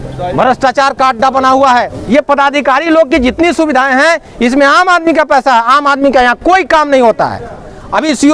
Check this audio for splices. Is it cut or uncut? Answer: cut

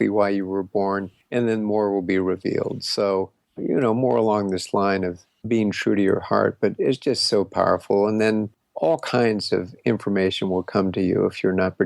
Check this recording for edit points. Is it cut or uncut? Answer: cut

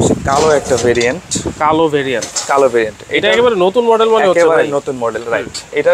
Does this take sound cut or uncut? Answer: uncut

